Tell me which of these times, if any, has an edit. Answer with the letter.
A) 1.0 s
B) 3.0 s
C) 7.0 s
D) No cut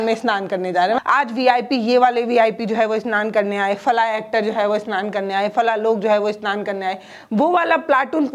A